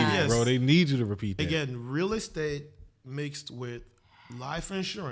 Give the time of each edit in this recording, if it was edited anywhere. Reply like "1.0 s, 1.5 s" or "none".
none